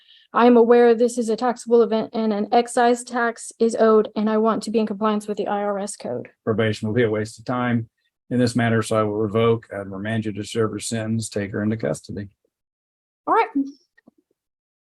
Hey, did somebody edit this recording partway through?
yes; 1 cut; at 6.3 s

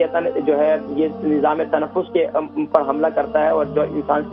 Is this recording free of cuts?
yes; 0 cuts

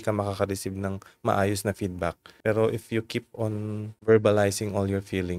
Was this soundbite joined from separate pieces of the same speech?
yes; 2 cuts; at 2.3 s, 3.9 s

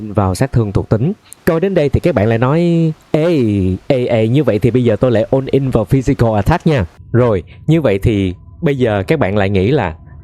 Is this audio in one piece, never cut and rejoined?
no; 2 cuts; at 1.3 s, 6.9 s

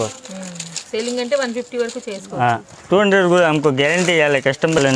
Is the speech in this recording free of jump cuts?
yes; 0 cuts

